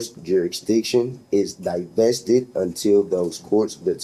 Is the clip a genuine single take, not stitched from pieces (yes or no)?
yes